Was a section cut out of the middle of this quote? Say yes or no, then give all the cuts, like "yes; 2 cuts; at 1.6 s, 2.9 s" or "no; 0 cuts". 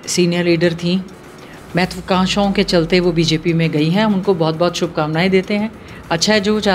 no; 0 cuts